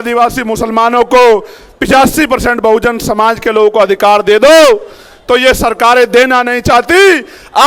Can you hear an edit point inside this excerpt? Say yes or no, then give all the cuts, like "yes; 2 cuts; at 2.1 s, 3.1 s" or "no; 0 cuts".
no; 0 cuts